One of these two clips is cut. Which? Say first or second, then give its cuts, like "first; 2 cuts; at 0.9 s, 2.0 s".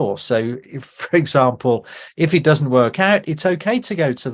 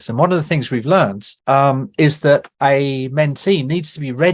second; 2 cuts; at 1.3 s, 2.5 s